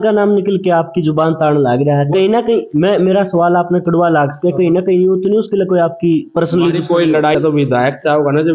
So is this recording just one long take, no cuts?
no; 1 cut; at 7.3 s

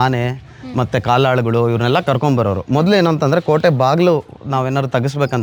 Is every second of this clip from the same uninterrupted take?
yes; 0 cuts

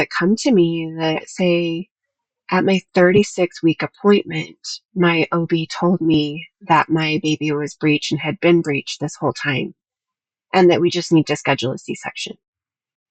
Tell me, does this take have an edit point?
yes; 1 cut; at 1.3 s

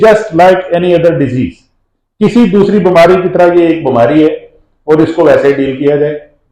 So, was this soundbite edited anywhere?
no; 0 cuts

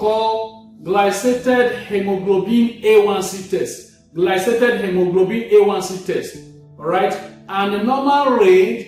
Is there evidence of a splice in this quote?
no; 0 cuts

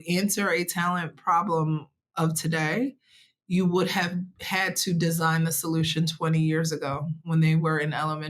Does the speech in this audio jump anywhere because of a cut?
no; 0 cuts

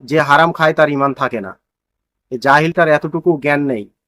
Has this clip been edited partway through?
no; 0 cuts

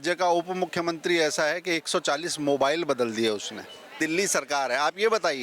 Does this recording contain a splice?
yes; 1 cut; at 4.0 s

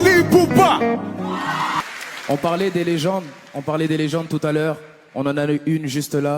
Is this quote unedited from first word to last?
no; 1 cut; at 2.0 s

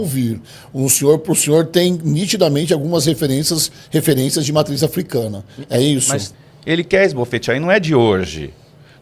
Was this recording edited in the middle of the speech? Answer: yes; 1 cut; at 6.3 s

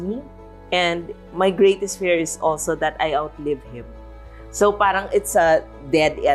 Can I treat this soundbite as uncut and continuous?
yes; 0 cuts

